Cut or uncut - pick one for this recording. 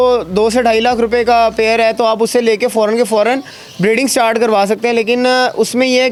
uncut